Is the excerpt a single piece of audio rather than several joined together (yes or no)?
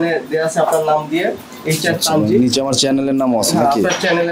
yes